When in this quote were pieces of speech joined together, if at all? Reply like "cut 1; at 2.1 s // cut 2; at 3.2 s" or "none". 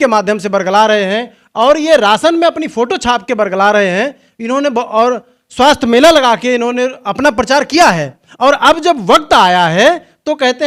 none